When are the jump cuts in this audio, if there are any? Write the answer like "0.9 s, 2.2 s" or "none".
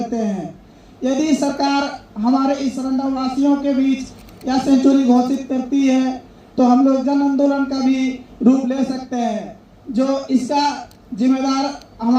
none